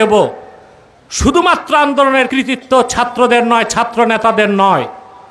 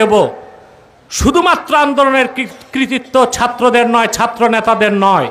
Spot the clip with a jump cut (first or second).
first